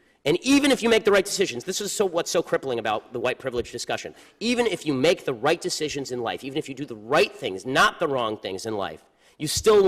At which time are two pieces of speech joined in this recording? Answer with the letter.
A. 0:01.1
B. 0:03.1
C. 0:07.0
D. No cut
C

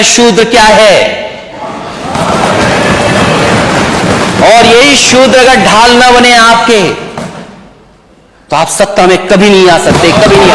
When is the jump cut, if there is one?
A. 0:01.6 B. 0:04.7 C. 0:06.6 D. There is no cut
D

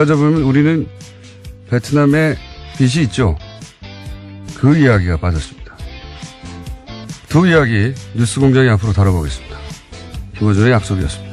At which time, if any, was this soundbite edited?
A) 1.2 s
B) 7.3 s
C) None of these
C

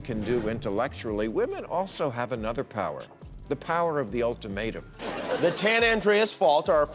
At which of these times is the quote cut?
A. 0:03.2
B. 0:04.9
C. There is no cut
B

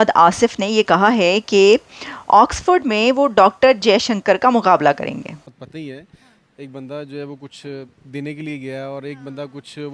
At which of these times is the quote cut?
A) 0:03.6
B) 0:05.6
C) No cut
B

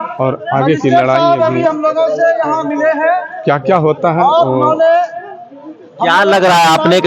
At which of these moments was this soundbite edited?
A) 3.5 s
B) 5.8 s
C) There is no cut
C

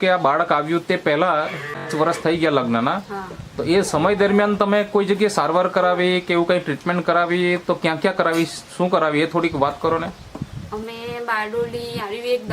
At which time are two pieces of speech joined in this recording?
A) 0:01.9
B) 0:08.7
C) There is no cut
A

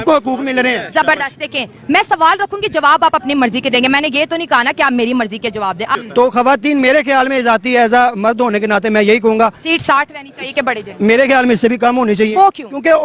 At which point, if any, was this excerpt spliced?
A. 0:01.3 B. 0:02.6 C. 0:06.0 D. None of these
C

